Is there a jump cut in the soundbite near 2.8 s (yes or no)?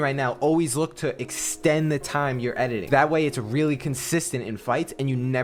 yes